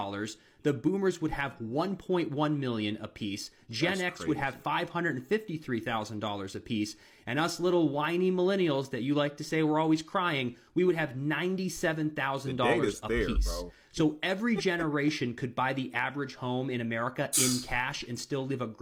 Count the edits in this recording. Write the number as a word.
zero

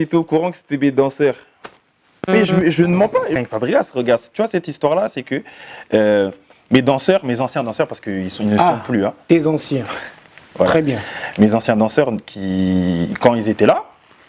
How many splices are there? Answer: two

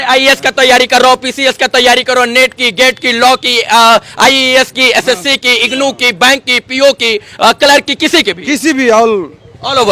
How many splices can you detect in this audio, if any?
zero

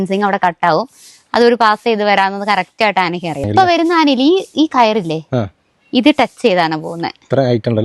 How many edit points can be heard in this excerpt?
one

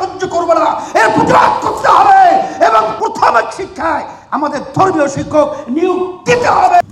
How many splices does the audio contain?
zero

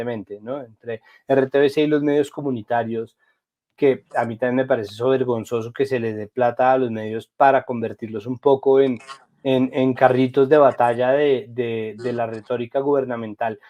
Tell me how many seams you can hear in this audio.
zero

